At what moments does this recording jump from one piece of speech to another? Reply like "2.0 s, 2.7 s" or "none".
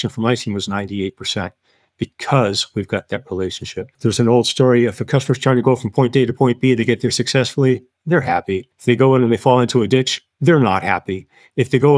3.9 s, 8.7 s